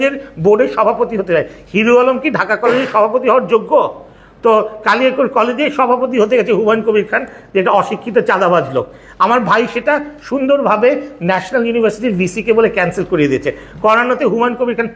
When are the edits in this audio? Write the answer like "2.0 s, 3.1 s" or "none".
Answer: none